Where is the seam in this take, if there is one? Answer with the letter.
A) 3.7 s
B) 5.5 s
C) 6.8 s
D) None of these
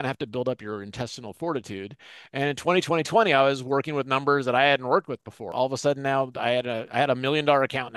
B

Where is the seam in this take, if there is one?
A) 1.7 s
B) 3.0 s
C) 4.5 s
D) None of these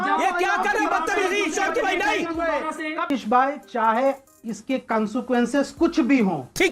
B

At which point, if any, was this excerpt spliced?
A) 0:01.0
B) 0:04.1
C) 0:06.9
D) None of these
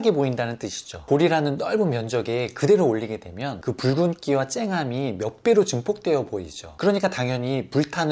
A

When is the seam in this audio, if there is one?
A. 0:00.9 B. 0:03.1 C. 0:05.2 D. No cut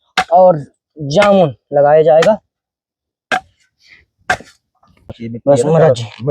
C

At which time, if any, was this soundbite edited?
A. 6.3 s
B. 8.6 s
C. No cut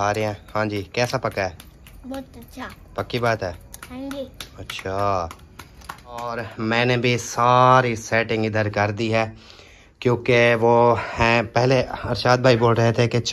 A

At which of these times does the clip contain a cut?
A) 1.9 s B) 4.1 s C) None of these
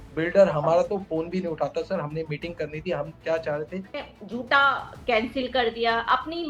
B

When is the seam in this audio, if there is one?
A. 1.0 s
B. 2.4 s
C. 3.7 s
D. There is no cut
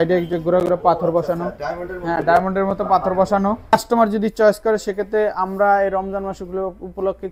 C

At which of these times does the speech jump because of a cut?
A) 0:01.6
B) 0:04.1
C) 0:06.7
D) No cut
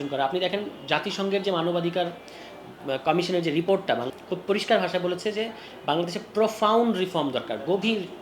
B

